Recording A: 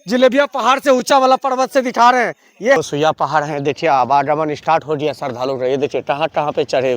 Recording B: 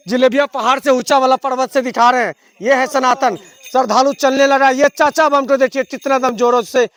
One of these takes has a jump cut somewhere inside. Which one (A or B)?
A